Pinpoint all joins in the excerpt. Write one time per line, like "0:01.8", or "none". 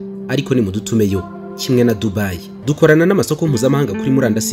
0:02.5

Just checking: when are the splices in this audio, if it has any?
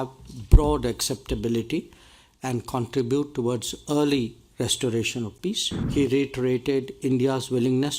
0:05.7

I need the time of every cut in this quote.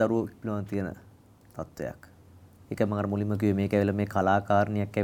none

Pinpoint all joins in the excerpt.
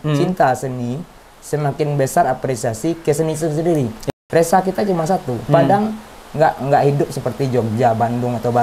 0:04.0

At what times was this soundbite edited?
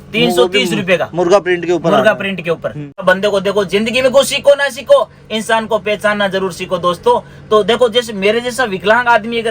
0:03.0

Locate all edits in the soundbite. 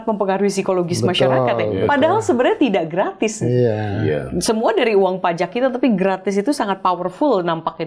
none

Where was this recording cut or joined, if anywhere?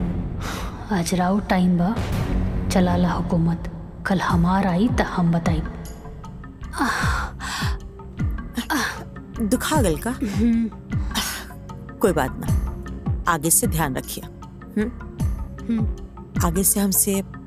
none

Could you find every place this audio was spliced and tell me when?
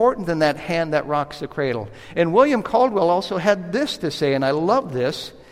none

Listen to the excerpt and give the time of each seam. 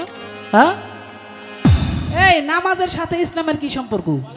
0:01.9

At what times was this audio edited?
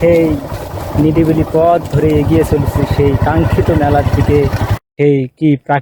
0:04.7

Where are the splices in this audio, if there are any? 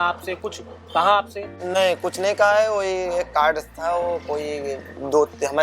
0:01.6

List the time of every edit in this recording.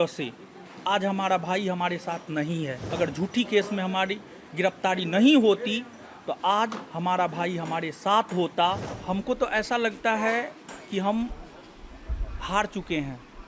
0:02.8
0:08.9

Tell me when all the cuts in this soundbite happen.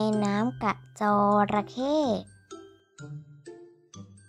none

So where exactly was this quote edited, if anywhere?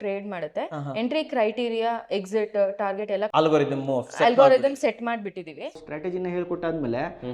0:03.3
0:05.8

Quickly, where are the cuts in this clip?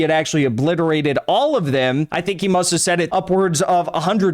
0:02.1
0:03.1

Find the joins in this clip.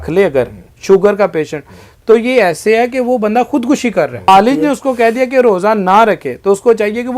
0:04.3

